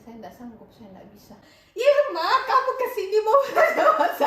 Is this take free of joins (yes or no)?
no